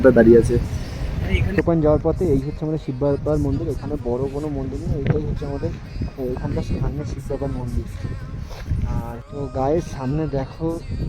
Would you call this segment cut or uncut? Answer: cut